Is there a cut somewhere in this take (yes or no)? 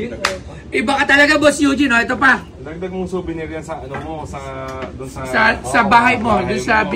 no